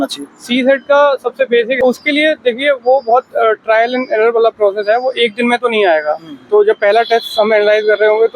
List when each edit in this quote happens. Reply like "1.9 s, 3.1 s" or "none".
1.8 s